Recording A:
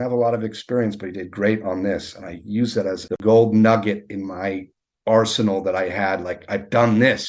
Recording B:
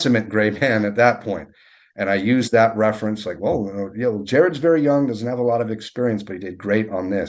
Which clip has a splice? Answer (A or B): A